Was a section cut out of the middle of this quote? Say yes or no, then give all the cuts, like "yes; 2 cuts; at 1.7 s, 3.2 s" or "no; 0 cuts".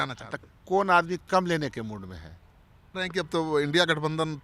yes; 1 cut; at 2.9 s